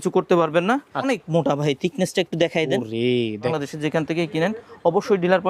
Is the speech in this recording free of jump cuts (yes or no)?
no